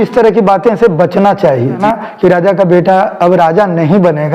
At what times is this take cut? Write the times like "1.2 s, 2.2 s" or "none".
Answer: 1.8 s